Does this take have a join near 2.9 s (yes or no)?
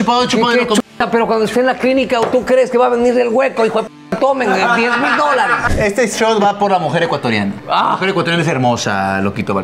no